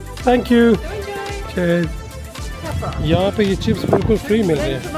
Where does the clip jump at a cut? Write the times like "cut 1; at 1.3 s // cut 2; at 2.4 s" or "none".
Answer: cut 1; at 2.1 s